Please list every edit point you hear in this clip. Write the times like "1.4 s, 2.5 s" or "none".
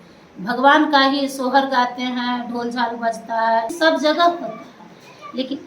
3.7 s